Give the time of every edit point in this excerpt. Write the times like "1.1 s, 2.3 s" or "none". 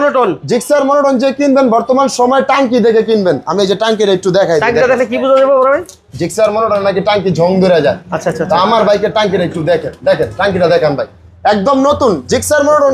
none